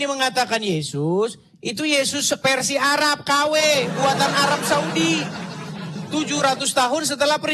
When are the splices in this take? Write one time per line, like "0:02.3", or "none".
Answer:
none